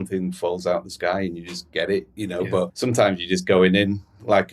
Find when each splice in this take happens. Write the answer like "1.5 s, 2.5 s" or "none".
2.7 s